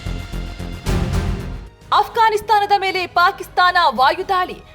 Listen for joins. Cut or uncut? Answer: cut